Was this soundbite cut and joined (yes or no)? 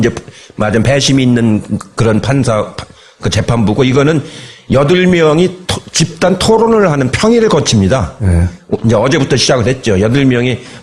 yes